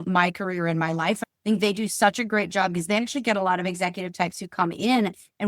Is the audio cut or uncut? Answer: cut